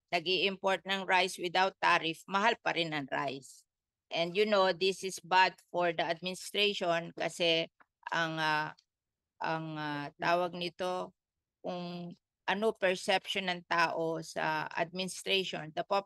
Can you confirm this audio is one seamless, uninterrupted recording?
yes; 0 cuts

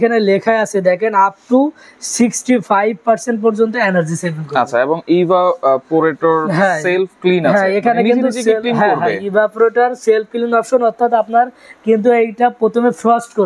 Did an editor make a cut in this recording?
no; 0 cuts

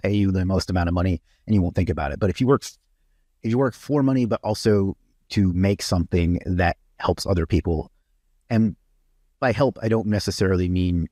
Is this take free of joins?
yes; 0 cuts

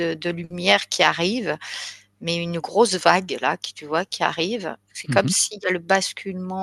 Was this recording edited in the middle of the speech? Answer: no; 0 cuts

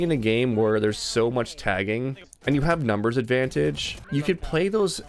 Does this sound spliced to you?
yes; 2 cuts; at 2.3 s, 3.9 s

